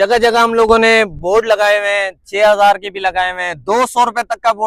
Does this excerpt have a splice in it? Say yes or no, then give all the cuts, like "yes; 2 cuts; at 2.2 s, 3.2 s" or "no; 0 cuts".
no; 0 cuts